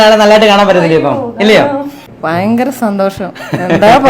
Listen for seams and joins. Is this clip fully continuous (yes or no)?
no